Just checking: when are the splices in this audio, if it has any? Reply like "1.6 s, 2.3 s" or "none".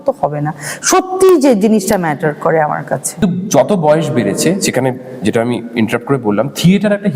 3.2 s